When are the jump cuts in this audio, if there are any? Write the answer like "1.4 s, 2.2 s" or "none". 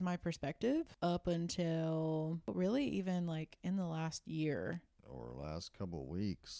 0.9 s, 2.5 s